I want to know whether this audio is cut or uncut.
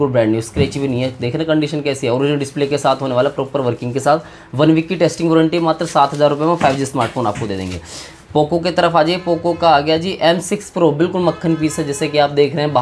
uncut